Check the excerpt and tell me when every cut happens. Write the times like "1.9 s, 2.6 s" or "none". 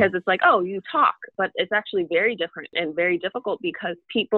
1.3 s, 2.7 s